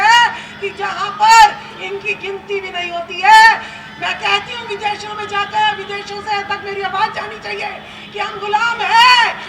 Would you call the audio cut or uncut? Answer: uncut